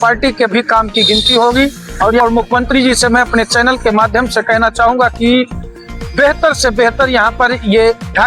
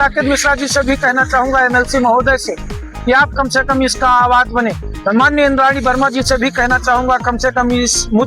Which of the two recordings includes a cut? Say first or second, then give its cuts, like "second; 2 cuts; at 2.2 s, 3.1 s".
first; 1 cut; at 2.2 s